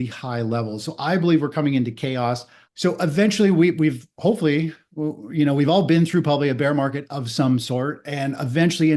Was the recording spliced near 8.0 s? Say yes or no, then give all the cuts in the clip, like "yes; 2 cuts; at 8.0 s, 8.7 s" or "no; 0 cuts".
no; 1 cut; at 2.7 s